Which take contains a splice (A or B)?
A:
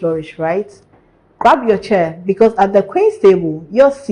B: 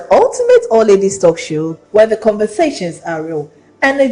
B